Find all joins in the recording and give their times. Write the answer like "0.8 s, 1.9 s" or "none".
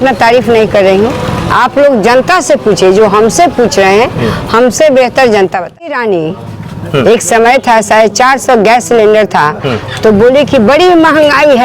6.0 s